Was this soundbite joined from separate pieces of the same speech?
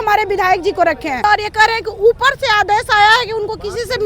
yes; 1 cut; at 1.2 s

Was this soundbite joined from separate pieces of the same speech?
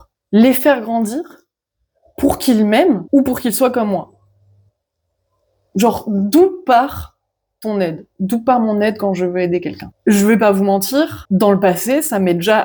no; 0 cuts

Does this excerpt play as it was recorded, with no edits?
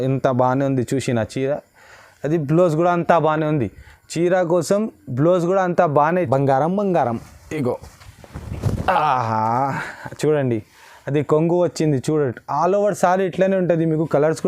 no; 1 cut; at 6.1 s

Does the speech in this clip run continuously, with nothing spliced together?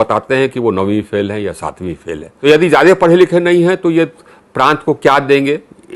no; 1 cut; at 2.3 s

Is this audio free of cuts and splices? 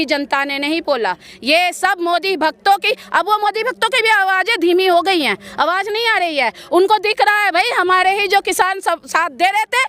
yes; 0 cuts

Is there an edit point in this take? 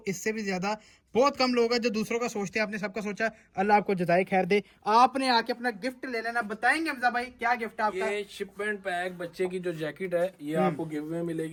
no; 0 cuts

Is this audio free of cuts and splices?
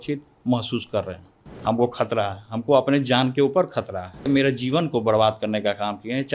no; 2 cuts; at 1.4 s, 4.3 s

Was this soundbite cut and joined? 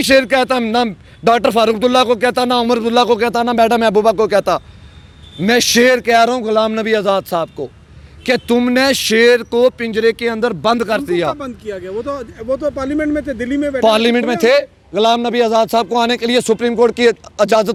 no; 0 cuts

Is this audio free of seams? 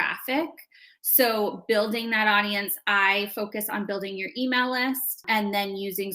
no; 1 cut; at 5.2 s

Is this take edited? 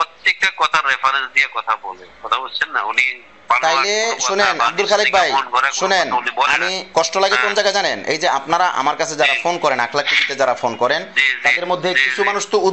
no; 0 cuts

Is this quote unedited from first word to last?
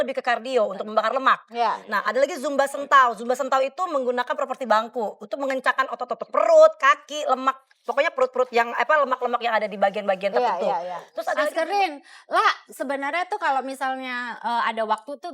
no; 1 cut; at 11.3 s

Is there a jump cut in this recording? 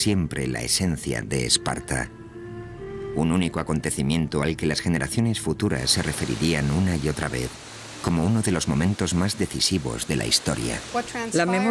no; 0 cuts

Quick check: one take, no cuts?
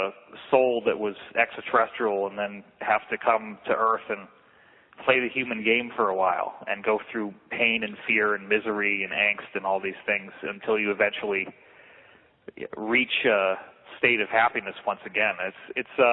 yes; 0 cuts

